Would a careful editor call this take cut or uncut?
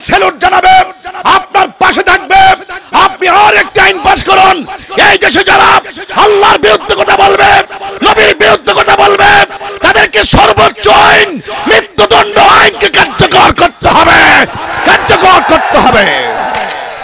uncut